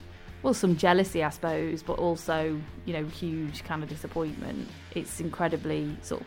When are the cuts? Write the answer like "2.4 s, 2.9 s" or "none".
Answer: 4.7 s